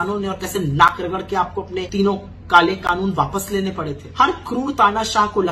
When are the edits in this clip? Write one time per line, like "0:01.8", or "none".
0:01.9
0:04.0